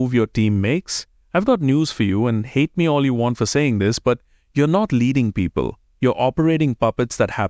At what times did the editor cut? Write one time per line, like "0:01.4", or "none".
0:05.8